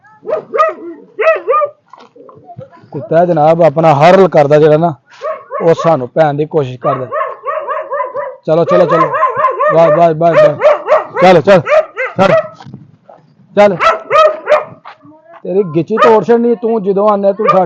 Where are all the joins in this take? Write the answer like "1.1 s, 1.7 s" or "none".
none